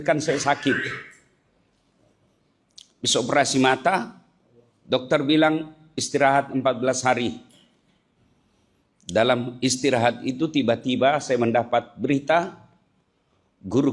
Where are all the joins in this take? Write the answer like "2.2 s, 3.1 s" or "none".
none